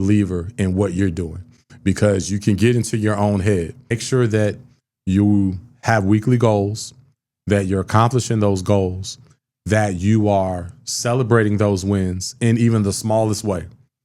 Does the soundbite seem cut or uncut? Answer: cut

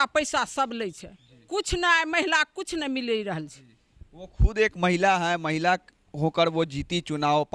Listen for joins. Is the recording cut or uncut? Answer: uncut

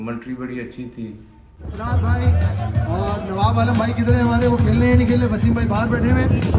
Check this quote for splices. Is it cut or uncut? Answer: uncut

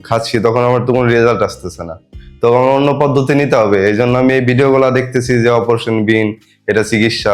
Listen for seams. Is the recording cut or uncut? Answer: uncut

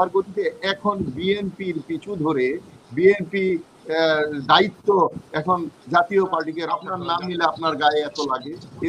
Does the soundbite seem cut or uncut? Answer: cut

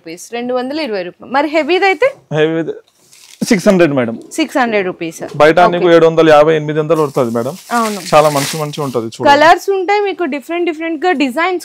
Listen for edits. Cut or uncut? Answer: uncut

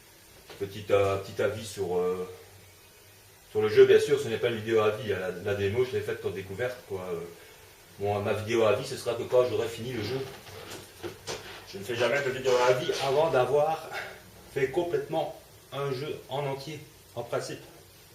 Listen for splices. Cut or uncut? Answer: cut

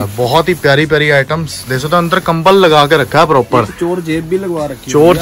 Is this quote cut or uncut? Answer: uncut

